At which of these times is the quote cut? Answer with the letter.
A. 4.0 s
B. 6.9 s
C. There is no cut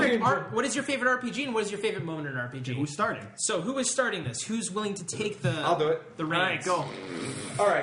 B